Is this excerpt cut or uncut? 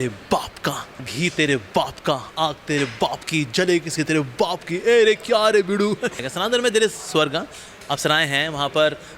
cut